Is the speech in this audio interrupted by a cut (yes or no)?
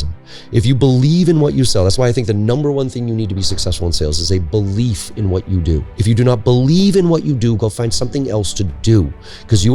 yes